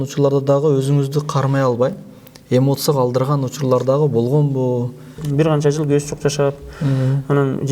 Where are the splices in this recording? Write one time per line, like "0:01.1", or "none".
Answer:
0:05.2